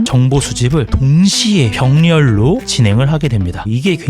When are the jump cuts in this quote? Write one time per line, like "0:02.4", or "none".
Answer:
none